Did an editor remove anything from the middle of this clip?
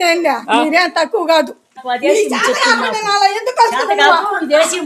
yes; 1 cut; at 1.7 s

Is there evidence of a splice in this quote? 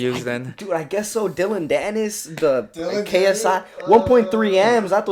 no; 0 cuts

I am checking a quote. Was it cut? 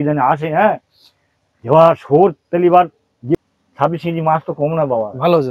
yes; 1 cut; at 3.3 s

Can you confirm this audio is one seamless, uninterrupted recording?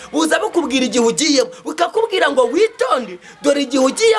yes; 0 cuts

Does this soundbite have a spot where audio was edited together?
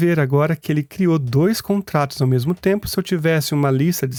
no; 0 cuts

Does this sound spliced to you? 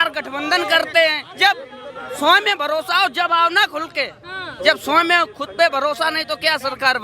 no; 0 cuts

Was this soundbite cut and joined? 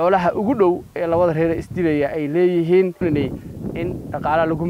yes; 1 cut; at 3.0 s

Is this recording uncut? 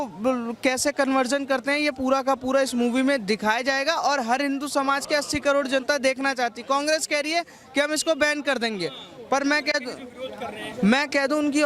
yes; 0 cuts

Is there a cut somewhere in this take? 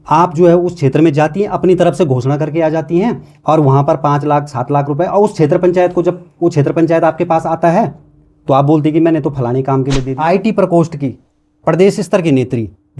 yes; 1 cut; at 10.0 s

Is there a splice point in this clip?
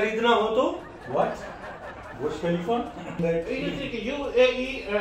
yes; 1 cut; at 3.2 s

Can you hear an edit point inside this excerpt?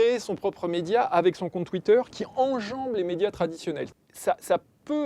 yes; 1 cut; at 3.9 s

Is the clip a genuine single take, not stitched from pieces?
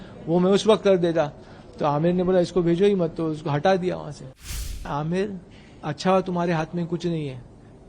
no; 1 cut; at 4.8 s

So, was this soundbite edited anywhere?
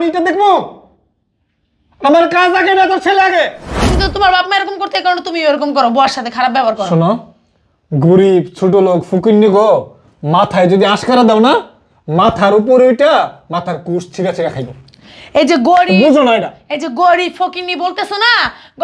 yes; 1 cut; at 3.8 s

